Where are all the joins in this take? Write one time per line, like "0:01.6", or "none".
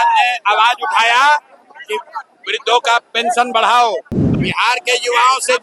0:04.2